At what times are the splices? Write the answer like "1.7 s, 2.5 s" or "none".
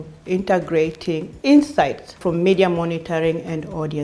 1.3 s, 2.2 s